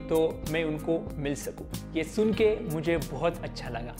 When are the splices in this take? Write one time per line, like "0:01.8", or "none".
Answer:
0:01.7